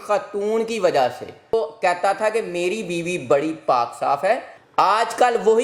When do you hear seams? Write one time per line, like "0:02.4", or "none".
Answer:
0:01.5